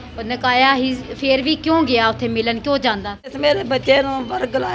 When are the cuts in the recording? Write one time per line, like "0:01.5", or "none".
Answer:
0:03.3